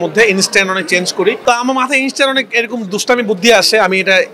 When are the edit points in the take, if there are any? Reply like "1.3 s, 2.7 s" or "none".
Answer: 1.4 s